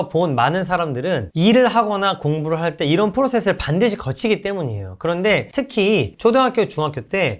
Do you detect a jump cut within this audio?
yes; 1 cut; at 5.5 s

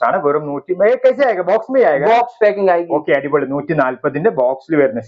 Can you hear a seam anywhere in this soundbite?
no; 0 cuts

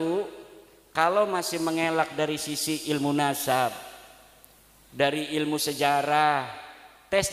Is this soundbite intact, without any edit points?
yes; 0 cuts

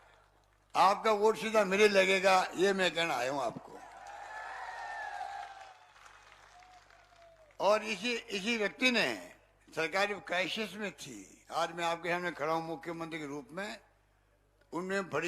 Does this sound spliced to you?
yes; 1 cut; at 5.8 s

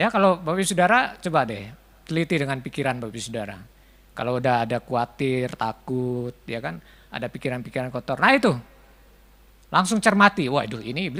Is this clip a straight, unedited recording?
yes; 0 cuts

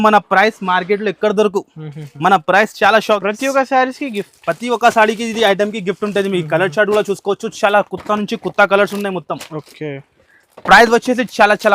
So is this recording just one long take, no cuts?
no; 1 cut; at 3.2 s

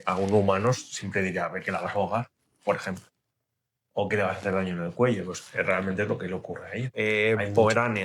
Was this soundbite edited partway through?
yes; 1 cut; at 6.8 s

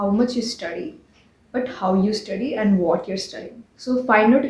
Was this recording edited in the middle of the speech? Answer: yes; 1 cut; at 3.6 s

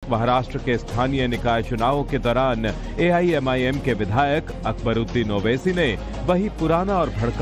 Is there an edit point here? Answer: no; 0 cuts

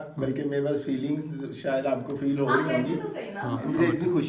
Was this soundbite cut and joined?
no; 0 cuts

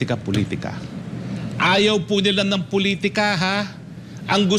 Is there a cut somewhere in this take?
no; 0 cuts

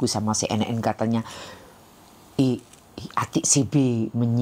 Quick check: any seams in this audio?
no; 0 cuts

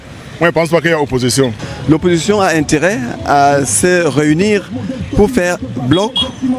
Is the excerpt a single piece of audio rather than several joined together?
no; 1 cut; at 1.7 s

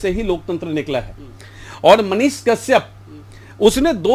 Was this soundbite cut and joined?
no; 0 cuts

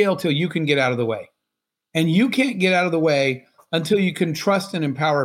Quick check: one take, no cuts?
yes; 0 cuts

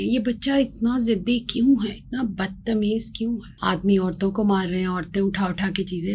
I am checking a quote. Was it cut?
yes; 1 cut; at 3.5 s

